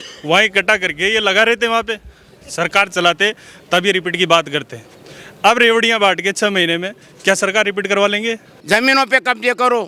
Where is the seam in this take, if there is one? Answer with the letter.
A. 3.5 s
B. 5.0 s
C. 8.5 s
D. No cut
C